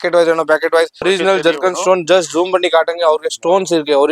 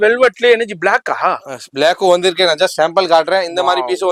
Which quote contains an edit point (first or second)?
first